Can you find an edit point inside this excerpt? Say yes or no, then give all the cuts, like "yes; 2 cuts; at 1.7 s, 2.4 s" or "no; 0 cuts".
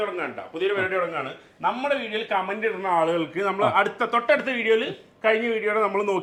no; 0 cuts